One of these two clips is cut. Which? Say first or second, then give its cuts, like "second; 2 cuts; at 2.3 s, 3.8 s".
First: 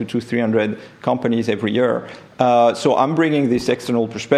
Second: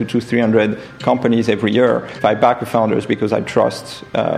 second; 1 cut; at 2.1 s